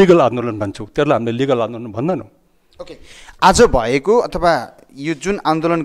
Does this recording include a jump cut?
no; 0 cuts

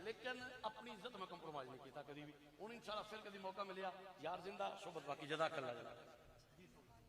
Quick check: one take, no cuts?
yes; 0 cuts

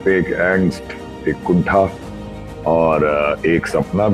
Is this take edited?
no; 0 cuts

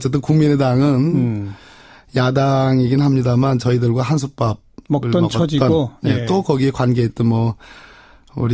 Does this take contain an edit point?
yes; 1 cut; at 3.6 s

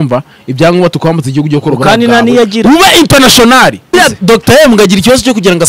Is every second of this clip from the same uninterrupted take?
no; 1 cut; at 3.9 s

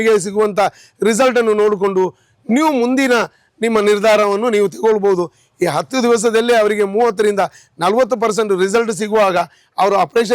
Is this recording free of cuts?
yes; 0 cuts

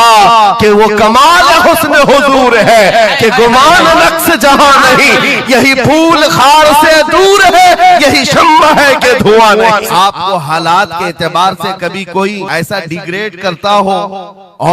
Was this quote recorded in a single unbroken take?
no; 2 cuts; at 9.9 s, 12.5 s

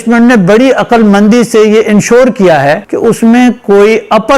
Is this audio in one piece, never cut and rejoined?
no; 1 cut; at 2.9 s

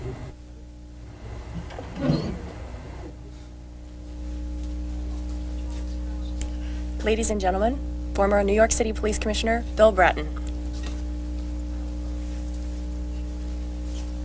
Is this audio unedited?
yes; 0 cuts

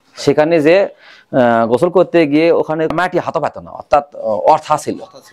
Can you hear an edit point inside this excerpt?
yes; 1 cut; at 2.9 s

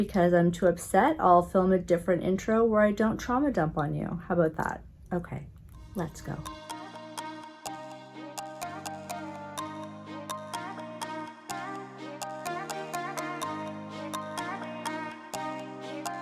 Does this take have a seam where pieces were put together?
no; 0 cuts

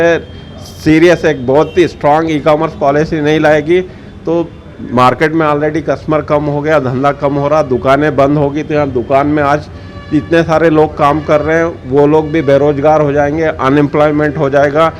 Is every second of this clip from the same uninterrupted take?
yes; 0 cuts

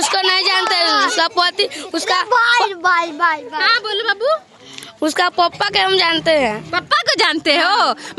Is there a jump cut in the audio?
no; 0 cuts

